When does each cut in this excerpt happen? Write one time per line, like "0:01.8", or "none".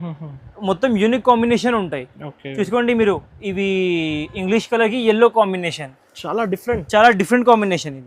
none